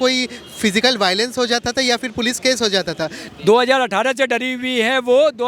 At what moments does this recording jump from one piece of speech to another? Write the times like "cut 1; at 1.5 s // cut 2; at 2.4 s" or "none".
cut 1; at 3.2 s